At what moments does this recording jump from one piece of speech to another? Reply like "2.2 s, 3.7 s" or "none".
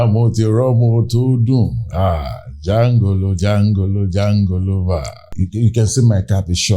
5.3 s